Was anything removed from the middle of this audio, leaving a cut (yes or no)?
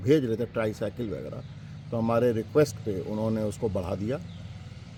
no